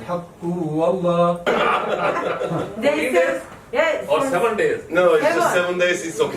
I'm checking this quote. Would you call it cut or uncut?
cut